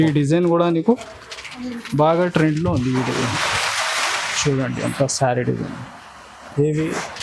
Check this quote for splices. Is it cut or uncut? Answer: uncut